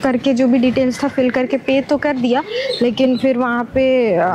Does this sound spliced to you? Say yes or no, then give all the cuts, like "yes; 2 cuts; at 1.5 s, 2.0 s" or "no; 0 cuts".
no; 0 cuts